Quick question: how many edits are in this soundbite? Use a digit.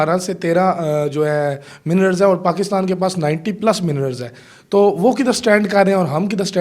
0